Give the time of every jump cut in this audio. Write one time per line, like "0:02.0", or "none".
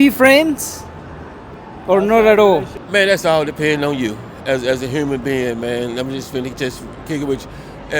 0:02.8